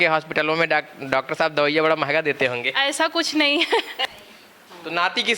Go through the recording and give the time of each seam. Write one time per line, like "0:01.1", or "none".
0:04.0